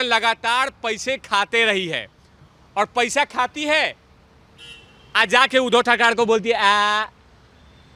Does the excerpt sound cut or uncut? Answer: uncut